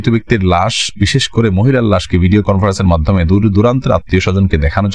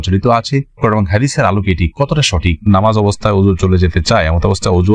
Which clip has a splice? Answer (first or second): second